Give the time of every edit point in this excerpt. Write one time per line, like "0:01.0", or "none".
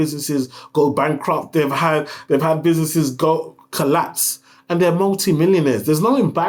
none